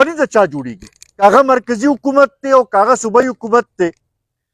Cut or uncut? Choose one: cut